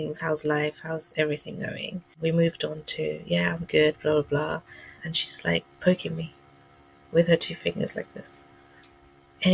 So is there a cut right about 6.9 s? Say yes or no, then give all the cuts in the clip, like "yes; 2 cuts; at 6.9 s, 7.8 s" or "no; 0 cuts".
no; 2 cuts; at 2.1 s, 4.9 s